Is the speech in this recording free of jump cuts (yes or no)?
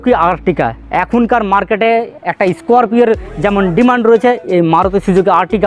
yes